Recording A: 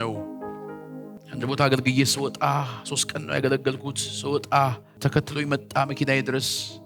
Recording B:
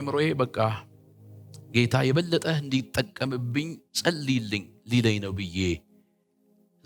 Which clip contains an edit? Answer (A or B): A